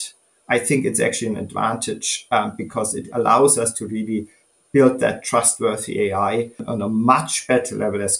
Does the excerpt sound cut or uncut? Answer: cut